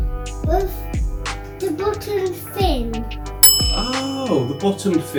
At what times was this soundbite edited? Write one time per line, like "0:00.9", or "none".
none

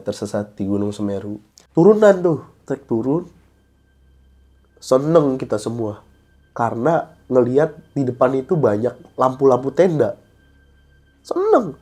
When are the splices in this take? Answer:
0:01.7

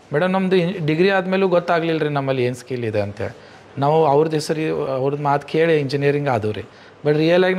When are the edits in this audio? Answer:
none

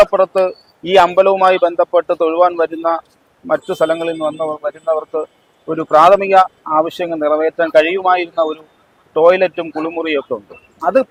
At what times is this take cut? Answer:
none

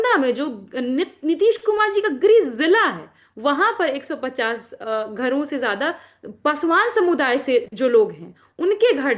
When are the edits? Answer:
none

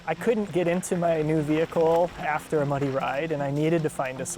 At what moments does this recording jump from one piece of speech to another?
none

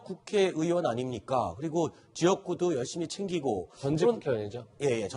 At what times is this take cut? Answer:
none

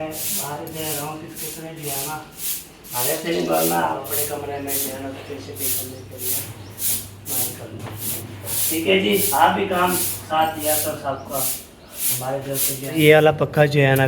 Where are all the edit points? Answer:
0:04.0
0:08.1
0:13.0

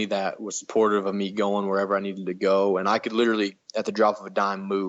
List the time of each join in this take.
none

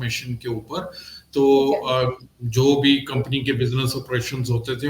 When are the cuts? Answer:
none

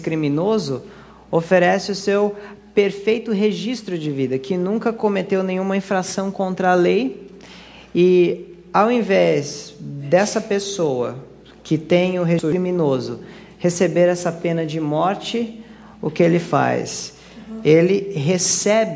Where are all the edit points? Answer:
0:02.8

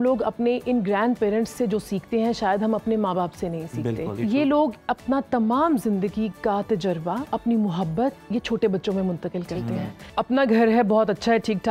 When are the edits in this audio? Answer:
0:04.1
0:07.2
0:10.1

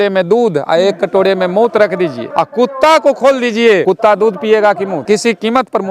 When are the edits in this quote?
0:02.2
0:03.8
0:05.0

